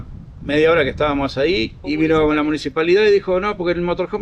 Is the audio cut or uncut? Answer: uncut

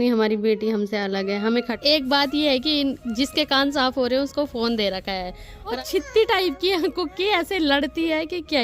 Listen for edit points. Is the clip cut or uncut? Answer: cut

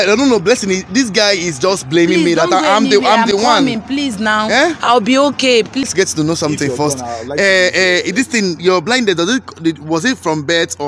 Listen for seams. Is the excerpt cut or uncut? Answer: uncut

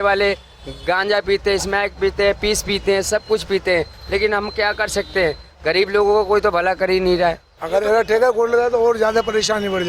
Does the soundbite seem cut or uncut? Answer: cut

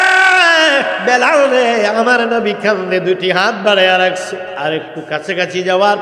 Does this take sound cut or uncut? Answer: cut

